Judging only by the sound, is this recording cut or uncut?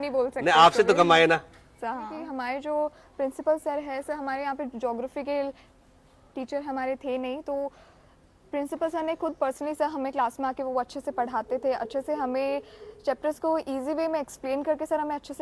uncut